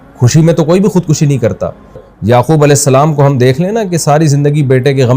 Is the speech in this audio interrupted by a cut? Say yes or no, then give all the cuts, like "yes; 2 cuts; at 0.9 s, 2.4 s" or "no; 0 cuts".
yes; 1 cut; at 2.1 s